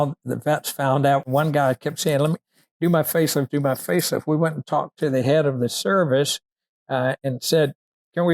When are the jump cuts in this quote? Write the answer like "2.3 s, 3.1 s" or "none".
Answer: 1.2 s